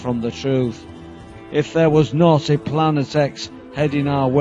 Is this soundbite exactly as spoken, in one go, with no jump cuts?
yes; 0 cuts

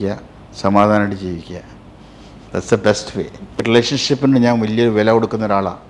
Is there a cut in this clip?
yes; 1 cut; at 3.5 s

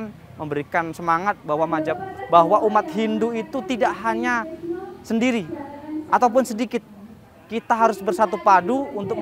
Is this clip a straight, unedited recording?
yes; 0 cuts

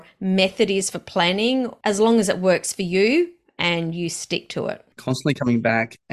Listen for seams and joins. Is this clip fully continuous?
no; 2 cuts; at 1.7 s, 5.2 s

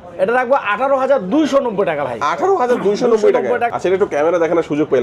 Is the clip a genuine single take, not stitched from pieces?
no; 1 cut; at 3.7 s

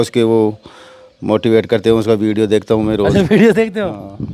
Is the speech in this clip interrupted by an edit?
no; 0 cuts

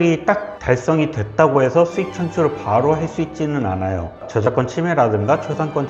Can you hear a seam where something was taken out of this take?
yes; 1 cut; at 4.2 s

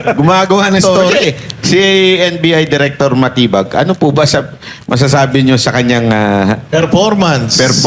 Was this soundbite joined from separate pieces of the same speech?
yes; 1 cut; at 1.0 s

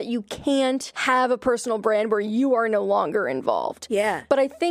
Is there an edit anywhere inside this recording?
yes; 1 cut; at 0.9 s

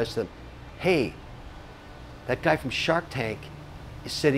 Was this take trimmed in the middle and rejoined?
no; 0 cuts

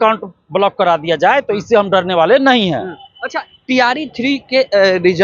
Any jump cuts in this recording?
no; 0 cuts

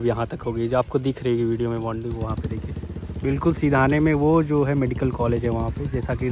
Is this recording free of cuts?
yes; 0 cuts

